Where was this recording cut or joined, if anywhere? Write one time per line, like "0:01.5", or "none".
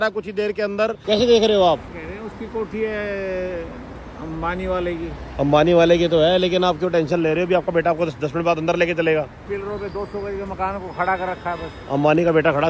0:01.0
0:01.9
0:09.5